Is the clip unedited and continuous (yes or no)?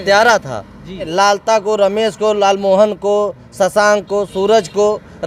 no